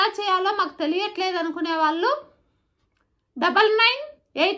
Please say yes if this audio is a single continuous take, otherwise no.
yes